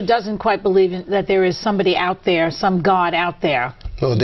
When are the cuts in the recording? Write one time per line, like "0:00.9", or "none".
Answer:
none